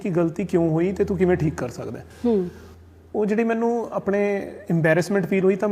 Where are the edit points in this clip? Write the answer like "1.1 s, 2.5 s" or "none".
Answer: none